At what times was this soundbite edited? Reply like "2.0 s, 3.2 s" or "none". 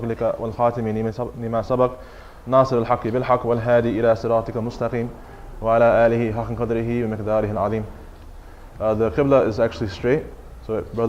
1.5 s